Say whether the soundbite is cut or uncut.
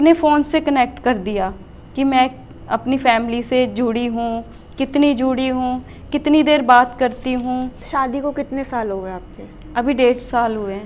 cut